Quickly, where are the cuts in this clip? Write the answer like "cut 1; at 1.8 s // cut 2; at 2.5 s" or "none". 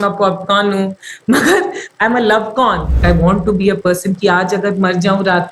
cut 1; at 1.8 s // cut 2; at 3.0 s